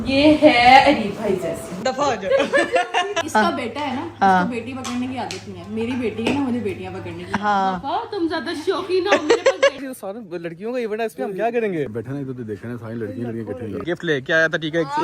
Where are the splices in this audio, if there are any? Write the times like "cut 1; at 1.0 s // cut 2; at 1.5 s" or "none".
cut 1; at 1.8 s // cut 2; at 3.2 s // cut 3; at 9.8 s // cut 4; at 11.9 s // cut 5; at 13.8 s